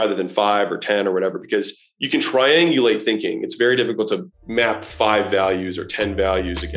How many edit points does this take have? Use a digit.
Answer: 1